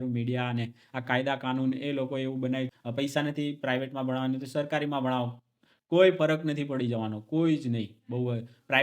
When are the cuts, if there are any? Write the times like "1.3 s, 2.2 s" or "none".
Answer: 2.8 s